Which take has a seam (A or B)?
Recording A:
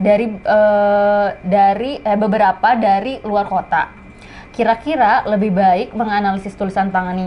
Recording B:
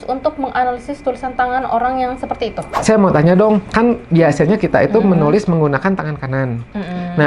B